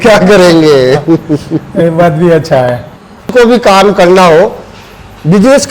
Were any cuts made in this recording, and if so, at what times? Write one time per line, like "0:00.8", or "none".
0:03.3